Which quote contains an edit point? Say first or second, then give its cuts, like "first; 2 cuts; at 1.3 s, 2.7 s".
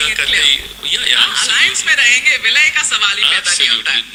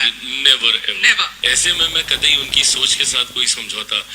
second; 1 cut; at 1.3 s